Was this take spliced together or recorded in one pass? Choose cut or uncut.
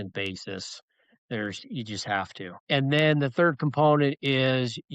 cut